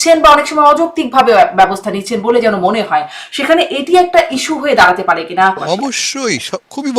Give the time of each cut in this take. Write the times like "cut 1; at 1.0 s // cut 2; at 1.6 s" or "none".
cut 1; at 5.6 s